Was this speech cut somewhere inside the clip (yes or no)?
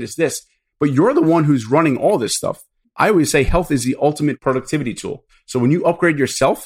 yes